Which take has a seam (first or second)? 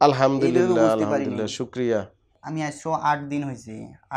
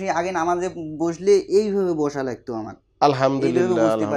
first